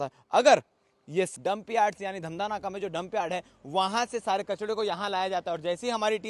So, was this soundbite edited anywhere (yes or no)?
yes